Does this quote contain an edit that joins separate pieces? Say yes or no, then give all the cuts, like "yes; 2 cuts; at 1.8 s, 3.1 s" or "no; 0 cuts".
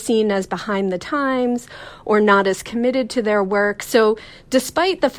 no; 0 cuts